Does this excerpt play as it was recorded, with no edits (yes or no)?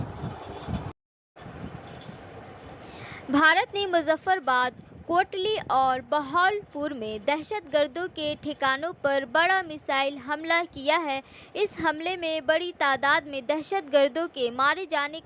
yes